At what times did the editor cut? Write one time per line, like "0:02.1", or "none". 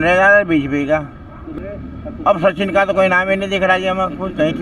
0:01.5